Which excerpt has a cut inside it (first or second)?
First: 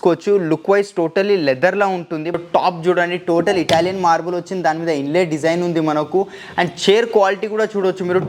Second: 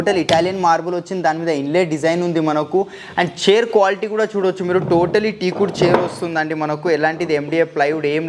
first